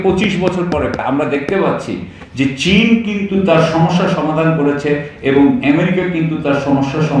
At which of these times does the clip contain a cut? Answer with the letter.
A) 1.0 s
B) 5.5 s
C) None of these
A